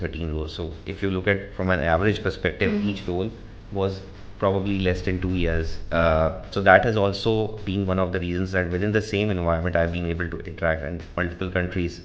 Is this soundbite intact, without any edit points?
no; 1 cut; at 6.5 s

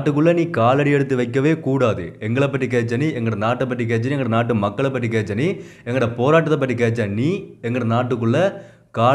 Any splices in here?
no; 0 cuts

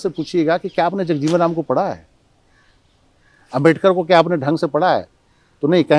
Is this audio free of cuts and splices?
yes; 0 cuts

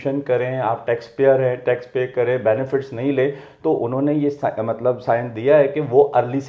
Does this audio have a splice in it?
no; 0 cuts

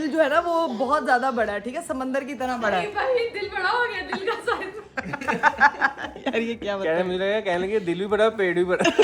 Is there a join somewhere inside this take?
no; 0 cuts

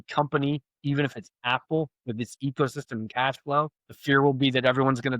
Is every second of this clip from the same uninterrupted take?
no; 1 cut; at 3.9 s

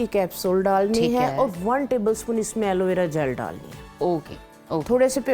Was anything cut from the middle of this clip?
no; 0 cuts

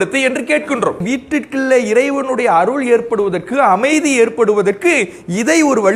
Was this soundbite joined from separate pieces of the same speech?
yes; 1 cut; at 1.0 s

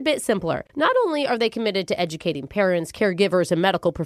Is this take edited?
no; 0 cuts

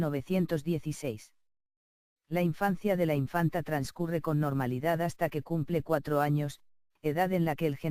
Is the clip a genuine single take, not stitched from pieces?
no; 1 cut; at 4.0 s

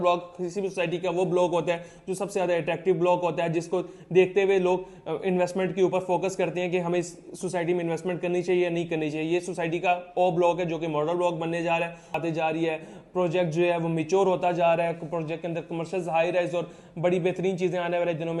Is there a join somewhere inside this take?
yes; 1 cut; at 12.2 s

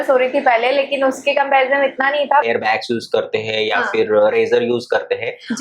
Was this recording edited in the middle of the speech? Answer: yes; 1 cut; at 2.4 s

